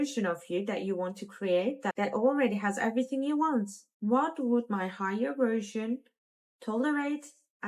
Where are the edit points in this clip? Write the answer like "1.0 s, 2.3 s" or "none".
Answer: 3.8 s